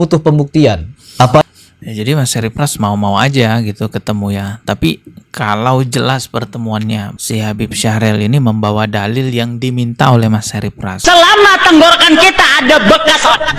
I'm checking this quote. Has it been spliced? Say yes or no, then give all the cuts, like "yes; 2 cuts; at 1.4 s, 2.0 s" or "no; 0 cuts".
yes; 1 cut; at 10.9 s